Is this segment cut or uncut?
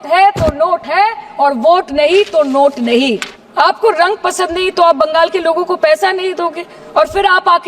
cut